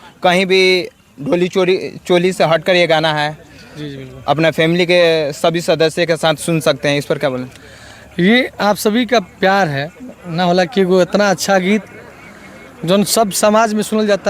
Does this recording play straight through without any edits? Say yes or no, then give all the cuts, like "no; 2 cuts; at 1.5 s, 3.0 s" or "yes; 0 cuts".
yes; 0 cuts